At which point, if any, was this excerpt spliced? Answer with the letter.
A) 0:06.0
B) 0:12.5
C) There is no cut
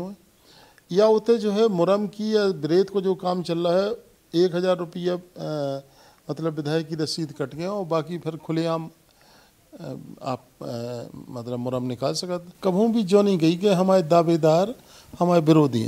B